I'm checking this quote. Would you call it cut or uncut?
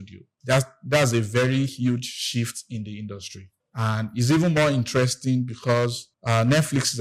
cut